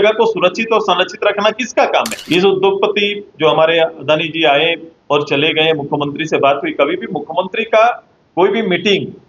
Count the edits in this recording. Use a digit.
1